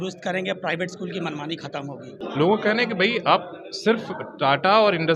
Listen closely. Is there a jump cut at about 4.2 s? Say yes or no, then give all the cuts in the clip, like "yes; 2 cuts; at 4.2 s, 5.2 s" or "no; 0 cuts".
no; 1 cut; at 2.2 s